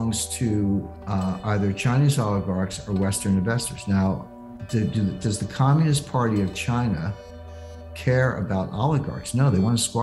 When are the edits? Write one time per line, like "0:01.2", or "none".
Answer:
none